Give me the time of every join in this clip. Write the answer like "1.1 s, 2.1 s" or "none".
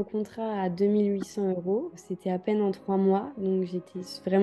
none